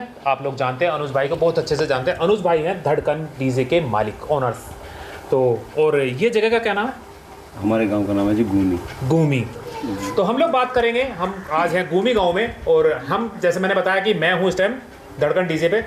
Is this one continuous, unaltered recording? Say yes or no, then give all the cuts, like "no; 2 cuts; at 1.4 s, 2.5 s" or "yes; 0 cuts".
yes; 0 cuts